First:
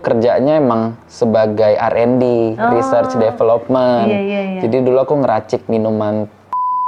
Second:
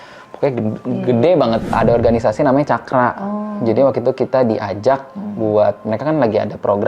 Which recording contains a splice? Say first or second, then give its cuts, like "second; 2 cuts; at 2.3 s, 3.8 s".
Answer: second; 1 cut; at 1.7 s